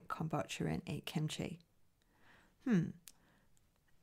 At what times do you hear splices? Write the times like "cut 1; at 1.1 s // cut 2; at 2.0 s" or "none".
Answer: none